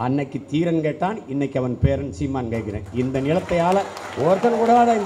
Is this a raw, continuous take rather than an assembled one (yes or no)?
yes